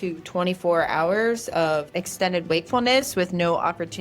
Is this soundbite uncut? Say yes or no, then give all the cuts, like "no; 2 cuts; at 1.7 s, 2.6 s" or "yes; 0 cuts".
no; 1 cut; at 2.0 s